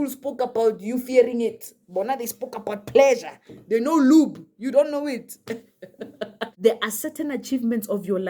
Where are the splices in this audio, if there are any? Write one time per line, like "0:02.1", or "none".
0:06.4